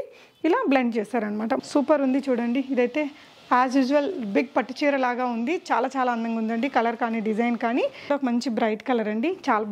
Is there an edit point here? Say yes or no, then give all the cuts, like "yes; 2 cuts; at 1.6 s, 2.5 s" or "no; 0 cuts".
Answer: yes; 2 cuts; at 1.6 s, 8.1 s